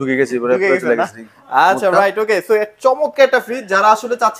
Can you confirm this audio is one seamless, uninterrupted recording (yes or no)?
yes